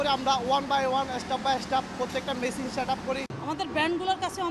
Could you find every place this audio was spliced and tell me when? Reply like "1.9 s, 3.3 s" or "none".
3.3 s

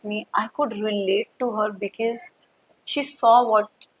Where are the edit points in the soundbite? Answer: none

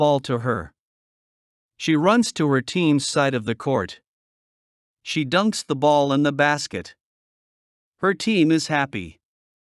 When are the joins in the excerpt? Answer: none

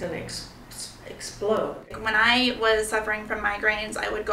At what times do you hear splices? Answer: 1.9 s

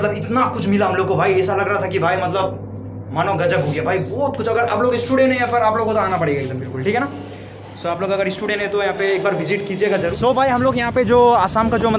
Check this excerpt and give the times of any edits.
10.1 s

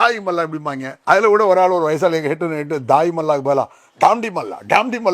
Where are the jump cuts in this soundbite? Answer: 0.9 s

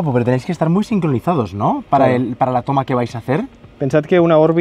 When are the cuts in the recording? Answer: none

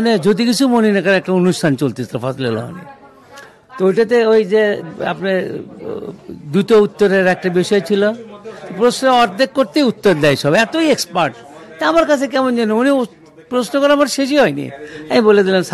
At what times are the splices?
none

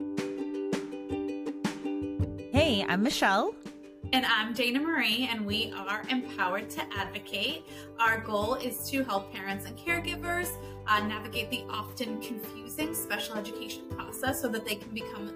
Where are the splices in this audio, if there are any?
0.9 s

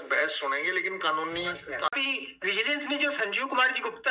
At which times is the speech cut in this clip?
1.9 s

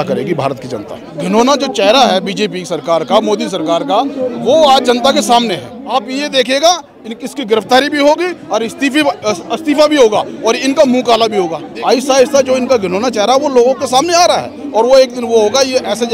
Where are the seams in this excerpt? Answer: 1.1 s, 5.8 s, 11.6 s

